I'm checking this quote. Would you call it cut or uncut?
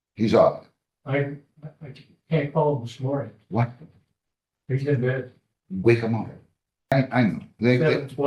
cut